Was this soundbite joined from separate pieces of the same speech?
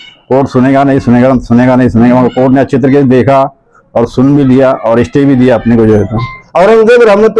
yes; 1 cut; at 6.4 s

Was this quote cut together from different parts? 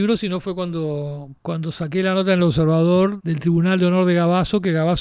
yes; 2 cuts; at 1.3 s, 3.2 s

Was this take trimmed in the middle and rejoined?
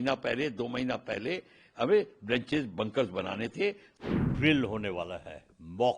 yes; 1 cut; at 3.9 s

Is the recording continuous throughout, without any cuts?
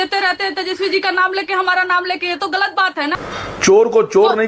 no; 1 cut; at 3.2 s

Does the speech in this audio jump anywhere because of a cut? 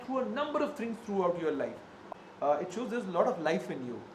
yes; 1 cut; at 2.0 s

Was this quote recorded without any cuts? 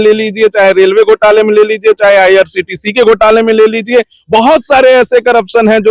yes; 0 cuts

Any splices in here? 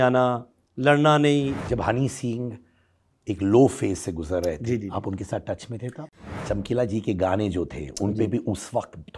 yes; 2 cuts; at 1.6 s, 6.2 s

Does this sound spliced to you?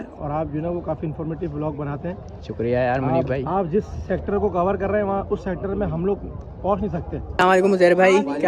yes; 1 cut; at 7.2 s

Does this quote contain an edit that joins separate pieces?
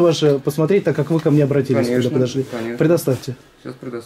no; 0 cuts

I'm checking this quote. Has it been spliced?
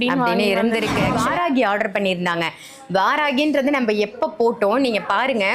yes; 1 cut; at 1.2 s

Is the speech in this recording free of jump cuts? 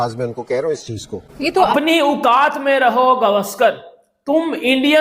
no; 1 cut; at 1.7 s

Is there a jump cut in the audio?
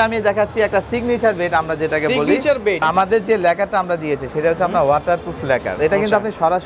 yes; 2 cuts; at 2.8 s, 5.7 s

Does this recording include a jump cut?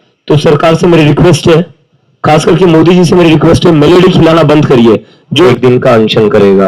yes; 1 cut; at 5.5 s

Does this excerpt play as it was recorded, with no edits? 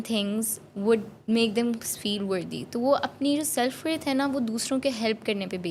yes; 0 cuts

